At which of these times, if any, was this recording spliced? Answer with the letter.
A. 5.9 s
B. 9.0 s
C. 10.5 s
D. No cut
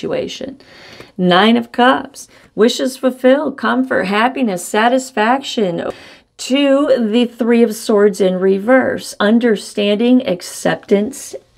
A